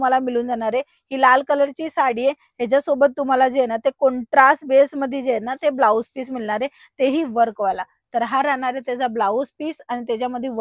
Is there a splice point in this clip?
no; 0 cuts

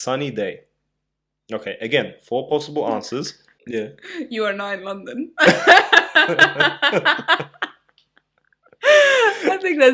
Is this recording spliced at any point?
yes; 1 cut; at 3.6 s

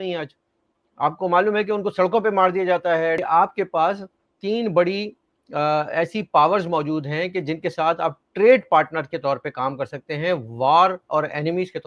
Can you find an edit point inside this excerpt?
yes; 1 cut; at 3.2 s

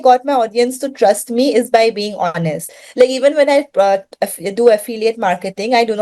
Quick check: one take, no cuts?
no; 1 cut; at 2.9 s

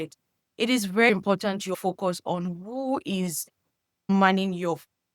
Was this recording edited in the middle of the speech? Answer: yes; 2 cuts; at 1.7 s, 4.1 s

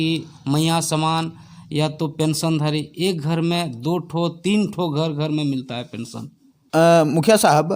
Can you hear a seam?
yes; 1 cut; at 6.6 s

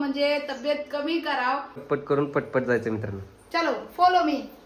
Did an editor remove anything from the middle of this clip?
yes; 1 cut; at 1.8 s

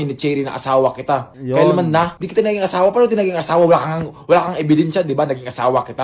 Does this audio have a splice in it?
no; 0 cuts

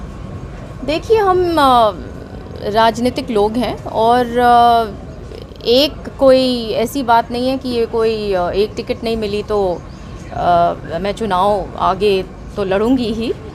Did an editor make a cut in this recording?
no; 0 cuts

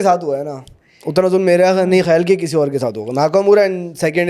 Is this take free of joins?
yes; 0 cuts

